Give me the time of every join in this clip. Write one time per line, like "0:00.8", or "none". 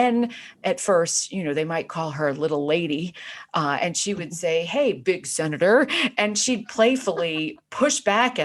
none